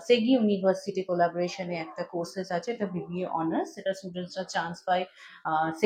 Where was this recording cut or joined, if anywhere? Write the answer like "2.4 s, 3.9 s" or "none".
none

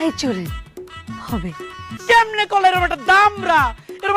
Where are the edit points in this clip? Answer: 1.9 s

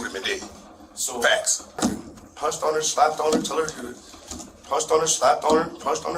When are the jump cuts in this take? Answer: 1.8 s

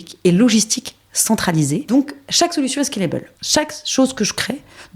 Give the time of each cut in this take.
1.9 s, 3.3 s

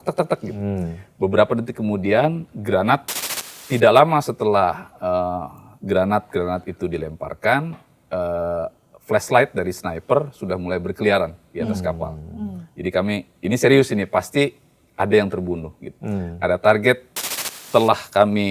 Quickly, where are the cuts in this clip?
3.1 s, 17.4 s

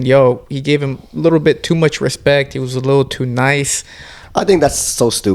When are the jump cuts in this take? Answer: 4.2 s

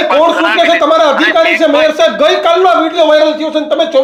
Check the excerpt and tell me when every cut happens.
none

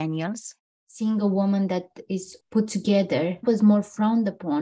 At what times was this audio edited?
0.9 s

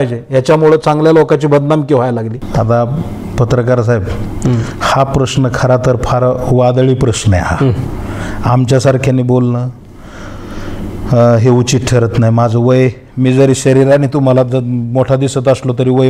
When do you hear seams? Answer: 2.4 s

